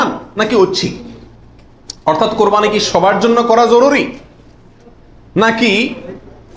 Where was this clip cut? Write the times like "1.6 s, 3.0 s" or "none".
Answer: none